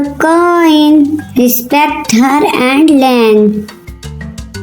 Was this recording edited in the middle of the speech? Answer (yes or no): yes